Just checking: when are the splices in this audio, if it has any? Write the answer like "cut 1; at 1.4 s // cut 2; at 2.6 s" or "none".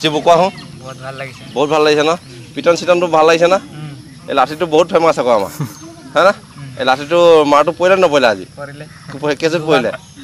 none